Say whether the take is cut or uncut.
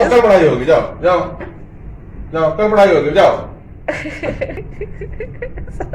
cut